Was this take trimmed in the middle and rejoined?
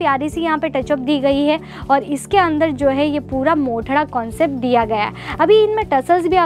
no; 0 cuts

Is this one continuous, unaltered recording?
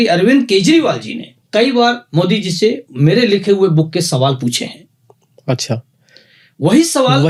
yes; 0 cuts

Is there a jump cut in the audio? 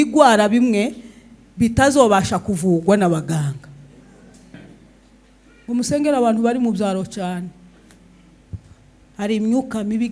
yes; 1 cut; at 4.5 s

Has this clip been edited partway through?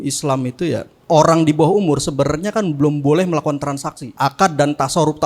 yes; 2 cuts; at 0.9 s, 4.0 s

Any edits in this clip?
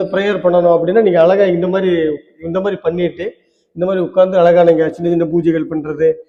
no; 0 cuts

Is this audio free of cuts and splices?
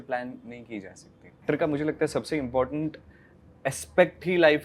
no; 1 cut; at 1.4 s

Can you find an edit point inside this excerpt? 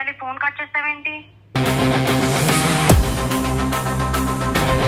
no; 0 cuts

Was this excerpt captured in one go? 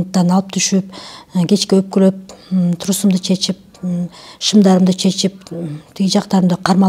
yes; 0 cuts

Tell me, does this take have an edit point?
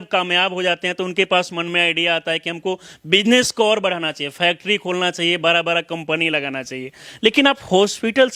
no; 0 cuts

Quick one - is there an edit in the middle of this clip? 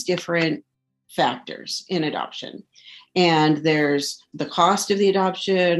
no; 0 cuts

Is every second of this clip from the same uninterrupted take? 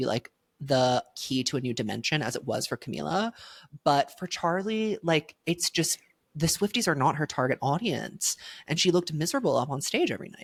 yes; 0 cuts

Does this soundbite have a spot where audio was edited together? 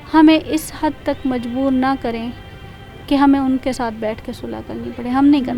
no; 0 cuts

